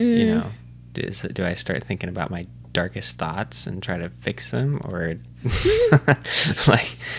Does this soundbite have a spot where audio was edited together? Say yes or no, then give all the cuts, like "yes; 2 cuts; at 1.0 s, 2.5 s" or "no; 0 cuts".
no; 0 cuts